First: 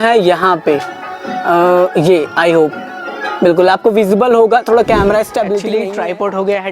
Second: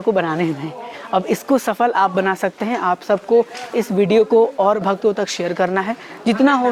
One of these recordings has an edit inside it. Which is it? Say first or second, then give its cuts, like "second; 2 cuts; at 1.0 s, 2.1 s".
first; 1 cut; at 5.7 s